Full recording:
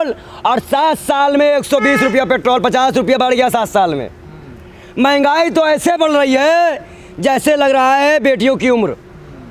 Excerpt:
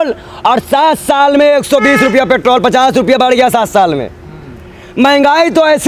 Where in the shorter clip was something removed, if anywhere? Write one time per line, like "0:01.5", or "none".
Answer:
none